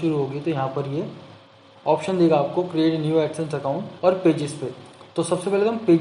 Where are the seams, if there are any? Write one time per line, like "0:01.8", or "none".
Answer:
0:03.9